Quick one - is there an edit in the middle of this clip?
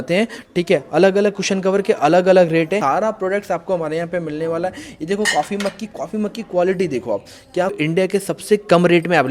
yes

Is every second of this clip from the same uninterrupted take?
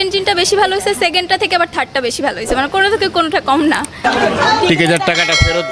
no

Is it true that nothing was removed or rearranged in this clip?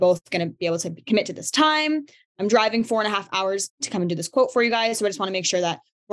no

